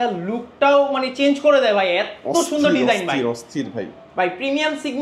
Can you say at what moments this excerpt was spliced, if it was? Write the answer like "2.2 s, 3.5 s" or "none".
none